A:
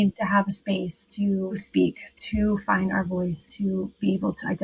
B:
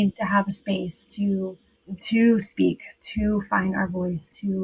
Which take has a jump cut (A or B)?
A